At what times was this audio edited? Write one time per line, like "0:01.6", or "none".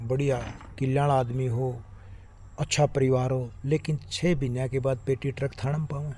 none